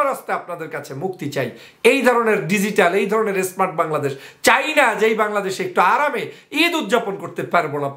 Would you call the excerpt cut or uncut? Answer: uncut